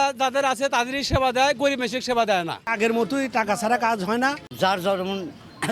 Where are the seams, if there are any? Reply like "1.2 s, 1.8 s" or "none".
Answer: 2.7 s, 4.4 s

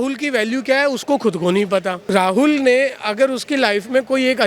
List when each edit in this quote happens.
2.0 s

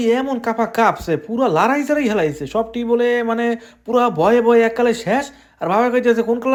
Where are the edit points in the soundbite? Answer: none

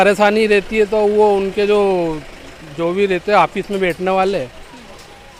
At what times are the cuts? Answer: none

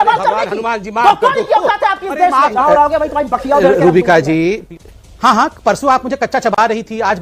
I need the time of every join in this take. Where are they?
2.6 s

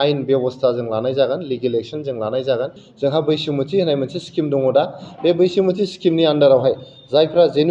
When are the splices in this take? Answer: 2.8 s

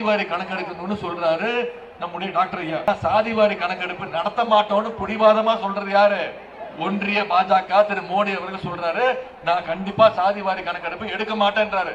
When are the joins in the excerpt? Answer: 2.9 s

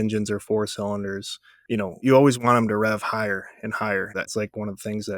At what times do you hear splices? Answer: 2.0 s, 4.3 s

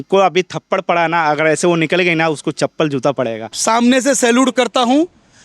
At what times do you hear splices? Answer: 3.5 s

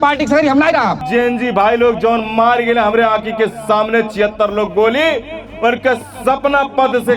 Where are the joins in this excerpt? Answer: 1.0 s

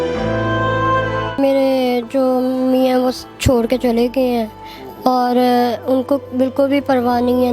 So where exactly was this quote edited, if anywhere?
1.4 s

